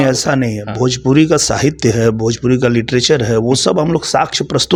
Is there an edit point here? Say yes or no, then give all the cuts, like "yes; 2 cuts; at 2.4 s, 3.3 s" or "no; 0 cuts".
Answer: no; 0 cuts